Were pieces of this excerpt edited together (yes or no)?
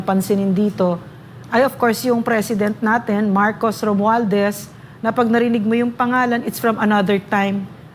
no